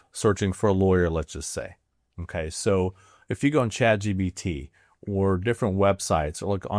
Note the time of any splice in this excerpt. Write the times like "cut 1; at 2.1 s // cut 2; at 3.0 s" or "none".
none